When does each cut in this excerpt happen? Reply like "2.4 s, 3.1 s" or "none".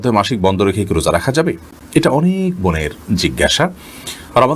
none